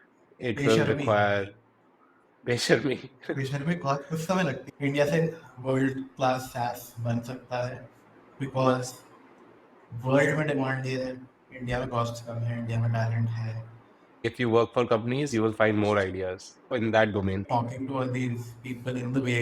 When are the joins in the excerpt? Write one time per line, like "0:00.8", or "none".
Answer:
0:04.7
0:14.2
0:17.4